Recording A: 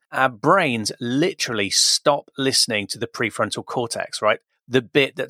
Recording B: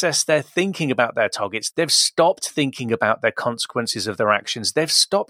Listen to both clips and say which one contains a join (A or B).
B